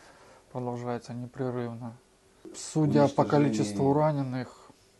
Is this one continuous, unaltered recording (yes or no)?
yes